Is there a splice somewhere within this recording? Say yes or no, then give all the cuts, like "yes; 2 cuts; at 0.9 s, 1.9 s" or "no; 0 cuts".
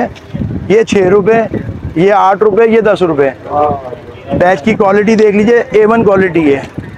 no; 0 cuts